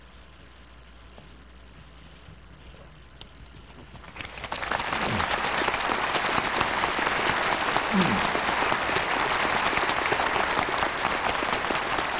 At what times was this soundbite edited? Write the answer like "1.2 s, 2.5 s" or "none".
none